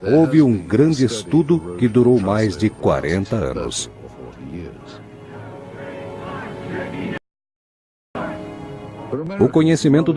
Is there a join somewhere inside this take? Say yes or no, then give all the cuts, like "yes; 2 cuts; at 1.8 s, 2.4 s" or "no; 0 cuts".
yes; 1 cut; at 3.4 s